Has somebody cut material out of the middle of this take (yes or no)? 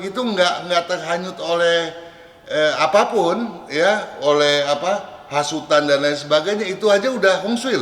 no